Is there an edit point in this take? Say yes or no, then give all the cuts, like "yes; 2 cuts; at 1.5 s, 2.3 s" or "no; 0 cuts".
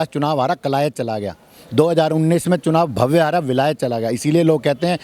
no; 0 cuts